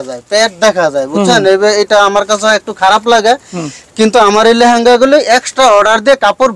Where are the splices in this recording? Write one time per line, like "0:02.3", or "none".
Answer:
none